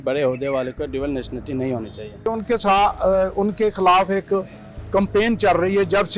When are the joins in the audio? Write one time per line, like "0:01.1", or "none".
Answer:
0:02.3